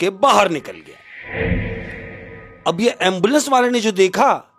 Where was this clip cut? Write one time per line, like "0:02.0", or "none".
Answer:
none